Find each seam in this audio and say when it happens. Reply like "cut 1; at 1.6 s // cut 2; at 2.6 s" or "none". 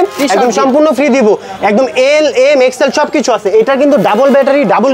none